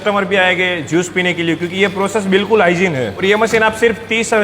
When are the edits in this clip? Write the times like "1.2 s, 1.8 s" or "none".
3.2 s